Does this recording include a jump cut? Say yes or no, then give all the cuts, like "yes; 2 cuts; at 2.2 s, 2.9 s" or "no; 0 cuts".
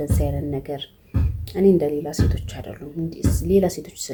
no; 0 cuts